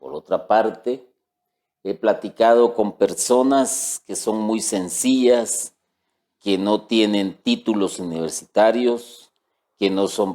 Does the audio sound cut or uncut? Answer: cut